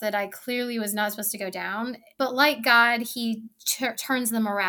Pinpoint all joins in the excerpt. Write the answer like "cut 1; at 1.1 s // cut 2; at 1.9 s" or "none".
cut 1; at 2.0 s